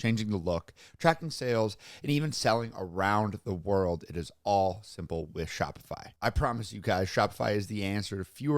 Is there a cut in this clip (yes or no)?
yes